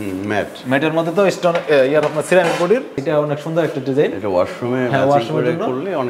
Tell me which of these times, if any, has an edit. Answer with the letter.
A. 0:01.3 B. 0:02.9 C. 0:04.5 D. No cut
B